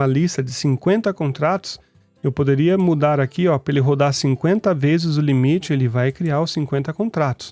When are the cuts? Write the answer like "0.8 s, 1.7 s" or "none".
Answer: none